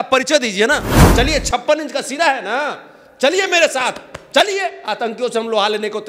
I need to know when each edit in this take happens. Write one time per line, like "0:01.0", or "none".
0:01.0